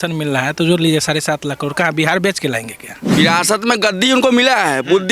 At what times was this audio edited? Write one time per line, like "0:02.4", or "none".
0:03.0